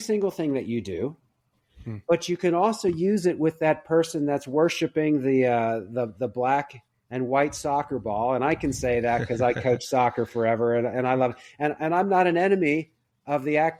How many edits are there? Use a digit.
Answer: 0